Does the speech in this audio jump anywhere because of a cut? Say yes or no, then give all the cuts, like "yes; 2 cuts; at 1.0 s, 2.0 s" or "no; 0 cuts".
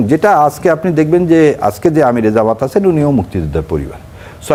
no; 0 cuts